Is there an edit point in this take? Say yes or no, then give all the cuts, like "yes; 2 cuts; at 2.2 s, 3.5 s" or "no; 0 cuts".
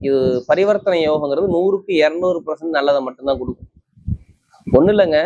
no; 0 cuts